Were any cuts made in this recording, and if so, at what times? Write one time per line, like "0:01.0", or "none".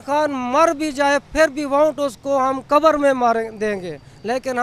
none